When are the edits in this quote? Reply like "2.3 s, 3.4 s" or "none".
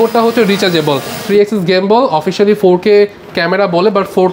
1.2 s